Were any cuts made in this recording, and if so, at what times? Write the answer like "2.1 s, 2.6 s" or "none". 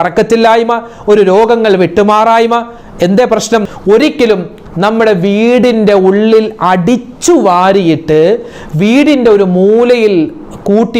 3.7 s